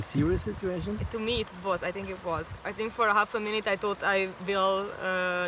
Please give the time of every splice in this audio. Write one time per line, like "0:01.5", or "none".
0:01.1
0:02.6